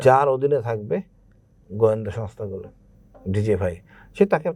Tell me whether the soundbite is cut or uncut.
uncut